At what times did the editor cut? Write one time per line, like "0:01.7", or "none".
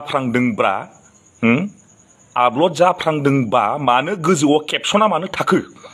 none